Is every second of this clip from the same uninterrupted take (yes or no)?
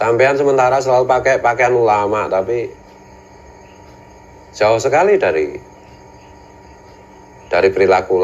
yes